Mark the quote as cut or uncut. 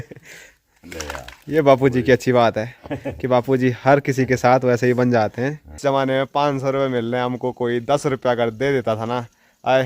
cut